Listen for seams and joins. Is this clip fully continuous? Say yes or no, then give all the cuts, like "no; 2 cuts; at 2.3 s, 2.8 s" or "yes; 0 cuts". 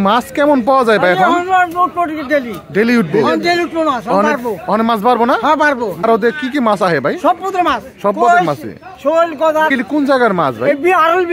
no; 2 cuts; at 6.0 s, 9.7 s